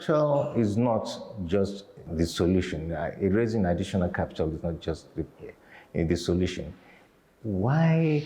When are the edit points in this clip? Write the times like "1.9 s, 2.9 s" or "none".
2.0 s